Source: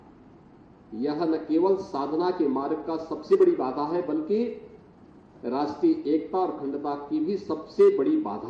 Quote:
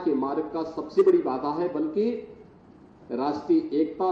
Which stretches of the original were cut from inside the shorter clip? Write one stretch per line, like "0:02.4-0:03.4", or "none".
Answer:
none